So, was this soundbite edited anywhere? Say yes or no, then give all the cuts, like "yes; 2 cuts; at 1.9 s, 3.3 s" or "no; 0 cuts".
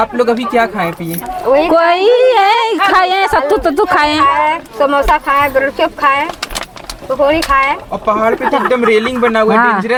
no; 0 cuts